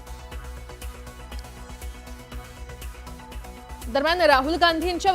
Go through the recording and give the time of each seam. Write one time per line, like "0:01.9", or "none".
0:01.0